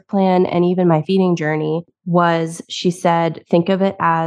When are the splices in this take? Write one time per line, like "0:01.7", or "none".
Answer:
0:01.8